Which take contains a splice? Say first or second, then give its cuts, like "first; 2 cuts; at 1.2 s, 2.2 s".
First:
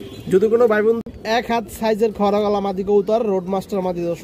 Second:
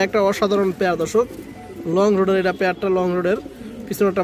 first; 1 cut; at 1.0 s